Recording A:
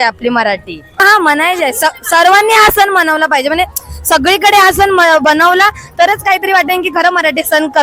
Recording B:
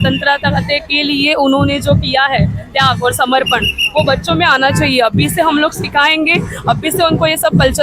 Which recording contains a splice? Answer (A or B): A